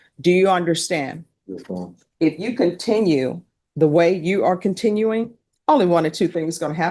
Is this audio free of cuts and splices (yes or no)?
yes